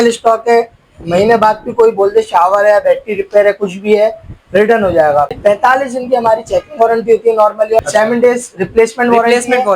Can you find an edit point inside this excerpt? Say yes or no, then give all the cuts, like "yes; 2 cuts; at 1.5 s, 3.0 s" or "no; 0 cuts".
yes; 2 cuts; at 5.4 s, 7.8 s